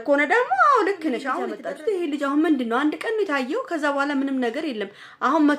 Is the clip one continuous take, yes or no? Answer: no